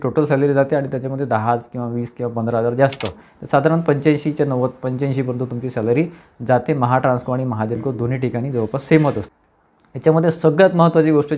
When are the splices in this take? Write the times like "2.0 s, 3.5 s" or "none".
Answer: none